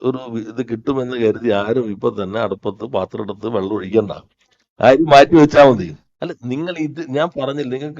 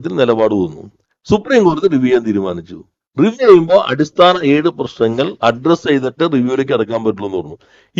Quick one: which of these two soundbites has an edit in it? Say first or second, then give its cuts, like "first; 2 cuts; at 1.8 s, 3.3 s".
first; 1 cut; at 6.0 s